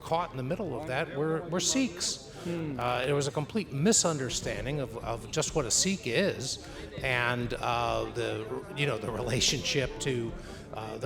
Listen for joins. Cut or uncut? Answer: uncut